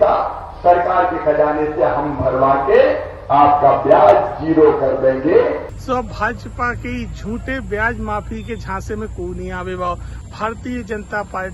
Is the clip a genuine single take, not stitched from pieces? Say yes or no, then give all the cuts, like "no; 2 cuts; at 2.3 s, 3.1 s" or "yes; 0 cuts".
no; 2 cuts; at 5.7 s, 10.1 s